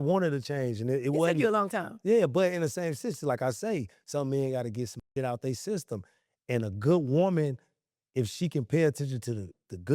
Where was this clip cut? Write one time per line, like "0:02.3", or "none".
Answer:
none